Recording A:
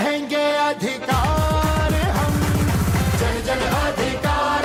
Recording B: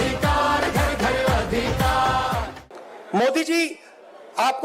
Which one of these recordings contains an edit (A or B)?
B